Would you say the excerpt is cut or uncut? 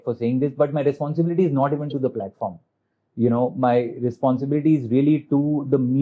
uncut